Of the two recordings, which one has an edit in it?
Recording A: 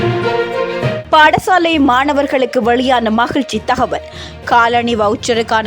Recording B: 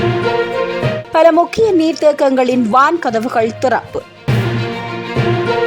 A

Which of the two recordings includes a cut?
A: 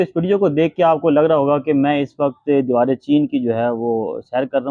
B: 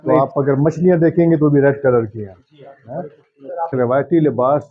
B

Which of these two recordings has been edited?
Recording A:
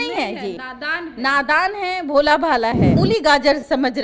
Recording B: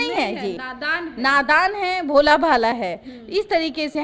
A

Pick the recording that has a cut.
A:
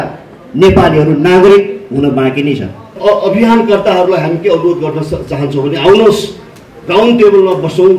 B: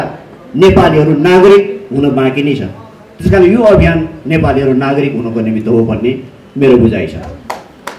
A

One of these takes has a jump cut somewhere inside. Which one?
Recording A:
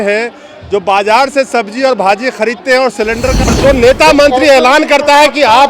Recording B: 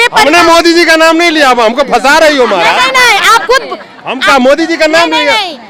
A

